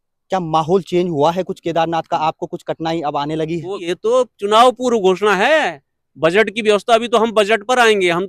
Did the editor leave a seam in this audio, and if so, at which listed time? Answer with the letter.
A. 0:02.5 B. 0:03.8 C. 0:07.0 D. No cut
B